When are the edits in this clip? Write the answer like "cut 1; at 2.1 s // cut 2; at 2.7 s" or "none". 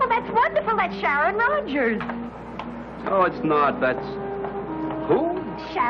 cut 1; at 4.3 s